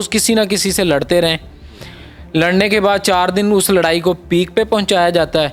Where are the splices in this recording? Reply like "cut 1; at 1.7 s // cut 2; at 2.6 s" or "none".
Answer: none